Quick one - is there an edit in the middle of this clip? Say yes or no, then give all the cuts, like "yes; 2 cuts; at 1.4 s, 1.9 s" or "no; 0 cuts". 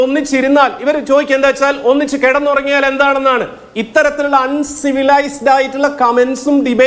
no; 0 cuts